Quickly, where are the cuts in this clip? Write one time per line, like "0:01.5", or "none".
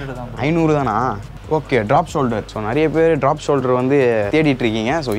0:01.3
0:02.5
0:04.3